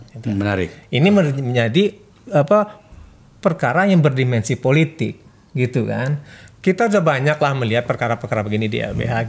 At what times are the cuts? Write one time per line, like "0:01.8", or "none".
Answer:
none